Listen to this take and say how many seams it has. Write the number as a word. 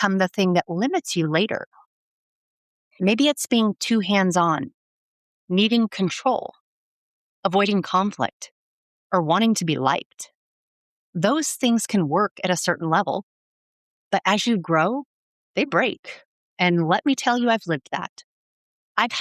zero